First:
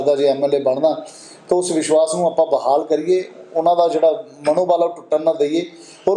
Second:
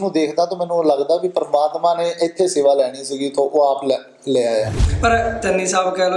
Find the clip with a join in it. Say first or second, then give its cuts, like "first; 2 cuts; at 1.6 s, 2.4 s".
second; 1 cut; at 4.8 s